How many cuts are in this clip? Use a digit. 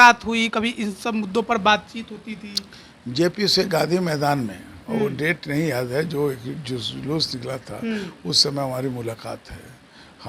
0